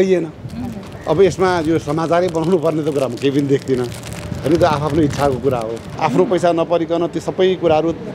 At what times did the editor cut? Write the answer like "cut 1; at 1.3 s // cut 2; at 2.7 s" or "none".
cut 1; at 5.8 s